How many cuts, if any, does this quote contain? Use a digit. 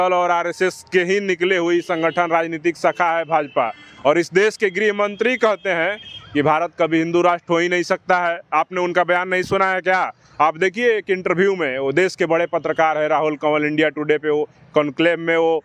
0